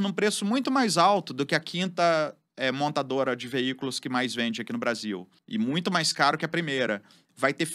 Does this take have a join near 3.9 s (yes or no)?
no